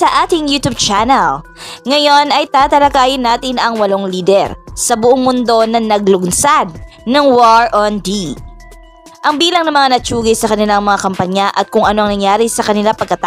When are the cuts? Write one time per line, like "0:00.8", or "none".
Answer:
none